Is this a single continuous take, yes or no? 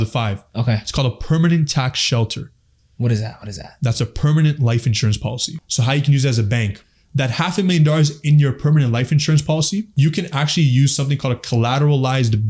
no